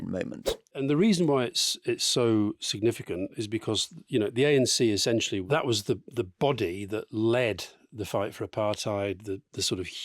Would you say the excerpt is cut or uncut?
cut